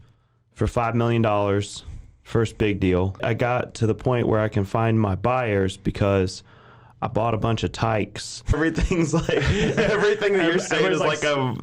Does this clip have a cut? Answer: yes; 2 cuts; at 3.2 s, 8.6 s

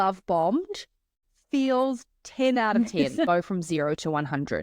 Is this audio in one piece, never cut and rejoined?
no; 2 cuts; at 1.2 s, 3.3 s

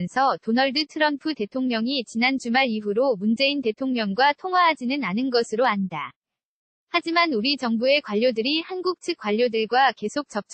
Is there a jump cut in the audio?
no; 0 cuts

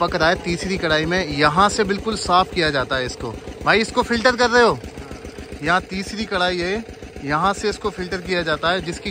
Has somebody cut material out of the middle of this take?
no; 0 cuts

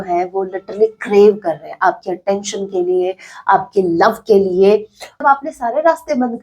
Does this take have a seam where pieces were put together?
yes; 1 cut; at 5.0 s

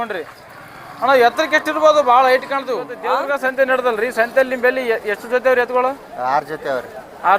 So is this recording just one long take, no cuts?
no; 1 cut; at 3.0 s

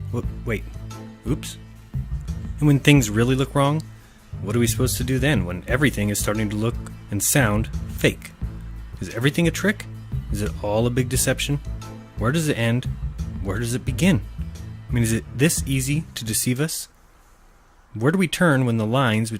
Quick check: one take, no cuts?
no; 1 cut; at 4.0 s

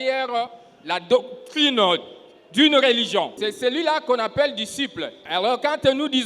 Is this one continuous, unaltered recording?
no; 2 cuts; at 3.4 s, 5.2 s

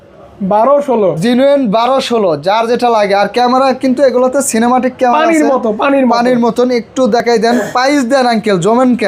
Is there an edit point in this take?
no; 0 cuts

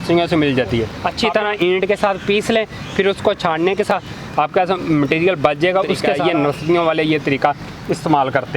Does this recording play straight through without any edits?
no; 3 cuts; at 1.0 s, 3.9 s, 6.1 s

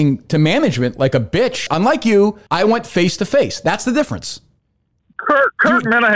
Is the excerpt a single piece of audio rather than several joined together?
no; 2 cuts; at 1.6 s, 2.4 s

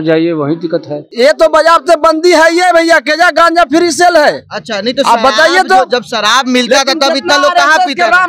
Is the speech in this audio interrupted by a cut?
yes; 1 cut; at 1.0 s

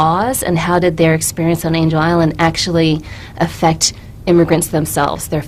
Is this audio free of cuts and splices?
yes; 0 cuts

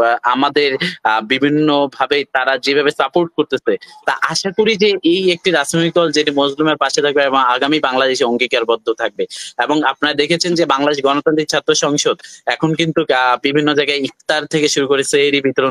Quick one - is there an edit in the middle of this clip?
no; 0 cuts

